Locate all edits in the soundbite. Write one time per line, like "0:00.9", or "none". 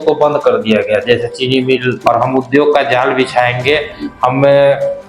0:02.0

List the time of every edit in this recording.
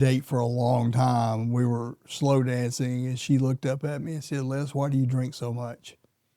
none

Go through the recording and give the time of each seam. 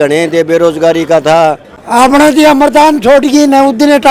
0:01.7

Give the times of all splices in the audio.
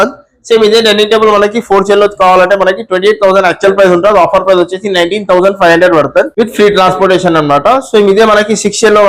none

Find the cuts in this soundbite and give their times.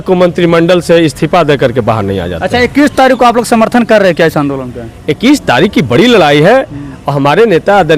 none

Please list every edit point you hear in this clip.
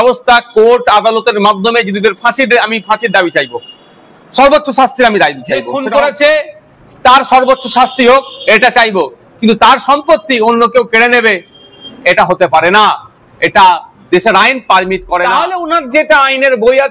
0:05.7
0:15.2

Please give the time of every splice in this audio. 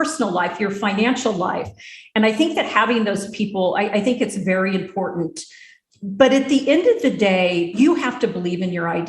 0:07.7

